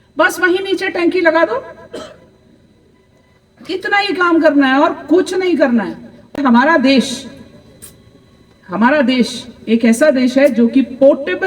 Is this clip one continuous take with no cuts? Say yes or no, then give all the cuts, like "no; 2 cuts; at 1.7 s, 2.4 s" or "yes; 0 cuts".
no; 1 cut; at 6.4 s